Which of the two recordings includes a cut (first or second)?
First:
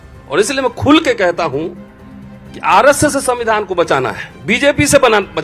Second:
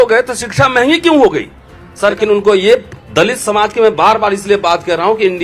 second